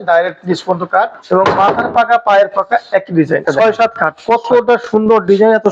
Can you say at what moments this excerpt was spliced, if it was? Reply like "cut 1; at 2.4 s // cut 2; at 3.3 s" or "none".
cut 1; at 1.2 s // cut 2; at 3.4 s